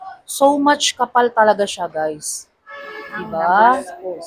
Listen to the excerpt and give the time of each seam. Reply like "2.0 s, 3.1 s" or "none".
none